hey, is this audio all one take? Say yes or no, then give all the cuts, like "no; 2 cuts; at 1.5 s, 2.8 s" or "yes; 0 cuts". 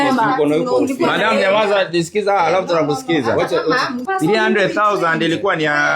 no; 1 cut; at 4.0 s